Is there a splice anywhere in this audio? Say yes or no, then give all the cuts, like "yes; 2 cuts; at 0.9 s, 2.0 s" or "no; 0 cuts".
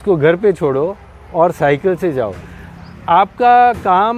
no; 0 cuts